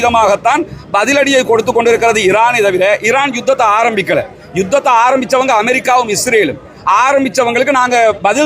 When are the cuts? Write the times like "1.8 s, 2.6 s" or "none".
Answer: none